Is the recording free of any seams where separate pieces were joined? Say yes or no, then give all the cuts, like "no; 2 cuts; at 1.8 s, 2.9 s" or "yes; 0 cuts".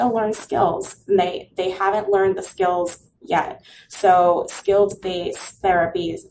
yes; 0 cuts